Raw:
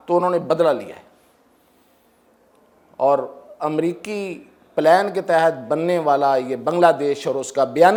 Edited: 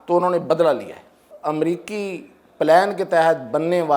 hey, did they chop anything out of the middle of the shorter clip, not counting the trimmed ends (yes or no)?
yes